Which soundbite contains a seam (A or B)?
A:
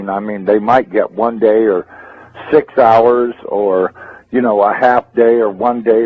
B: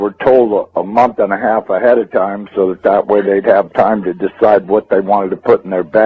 A